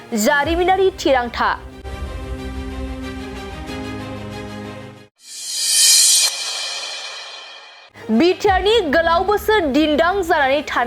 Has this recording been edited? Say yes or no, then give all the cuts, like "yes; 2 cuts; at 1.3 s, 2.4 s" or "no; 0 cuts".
yes; 2 cuts; at 1.8 s, 5.0 s